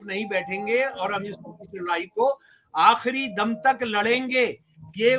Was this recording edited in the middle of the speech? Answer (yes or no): no